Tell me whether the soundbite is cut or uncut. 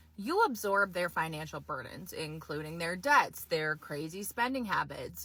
uncut